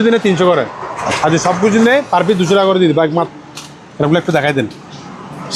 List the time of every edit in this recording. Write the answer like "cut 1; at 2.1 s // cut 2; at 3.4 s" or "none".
cut 1; at 3.3 s